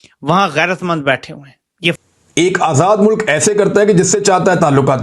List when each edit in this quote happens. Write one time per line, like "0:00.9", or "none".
0:02.0